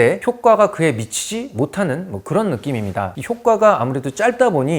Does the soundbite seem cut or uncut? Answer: uncut